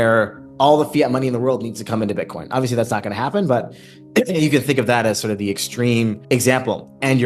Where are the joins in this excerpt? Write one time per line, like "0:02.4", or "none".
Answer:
0:06.2